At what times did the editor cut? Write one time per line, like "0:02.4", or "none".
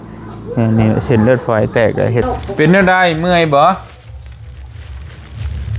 0:02.2